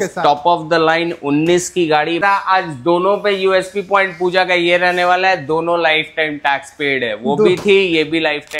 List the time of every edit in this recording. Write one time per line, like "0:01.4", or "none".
0:02.2